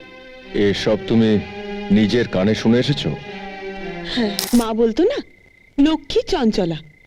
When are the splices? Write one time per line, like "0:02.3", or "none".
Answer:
0:04.4